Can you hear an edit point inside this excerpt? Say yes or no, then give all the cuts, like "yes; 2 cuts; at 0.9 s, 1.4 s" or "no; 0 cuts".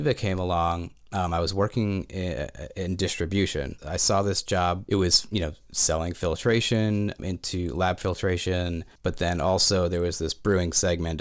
yes; 4 cuts; at 3.8 s, 4.8 s, 7.2 s, 8.9 s